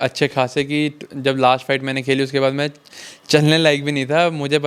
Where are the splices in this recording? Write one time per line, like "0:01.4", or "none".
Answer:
none

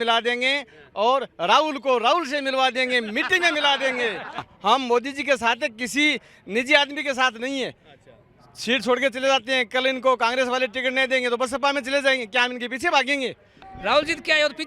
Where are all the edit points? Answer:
0:04.5
0:13.6

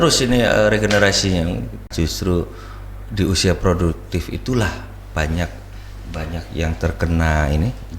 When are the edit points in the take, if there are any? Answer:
0:01.9

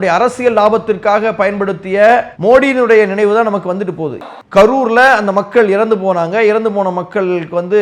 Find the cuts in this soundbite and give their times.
0:04.2

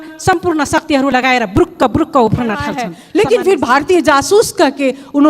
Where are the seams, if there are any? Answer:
0:02.9

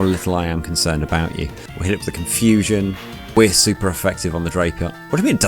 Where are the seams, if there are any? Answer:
0:01.7
0:03.3

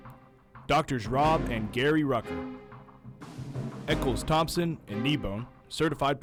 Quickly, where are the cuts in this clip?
none

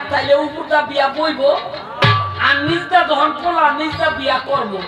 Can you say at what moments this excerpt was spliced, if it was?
none

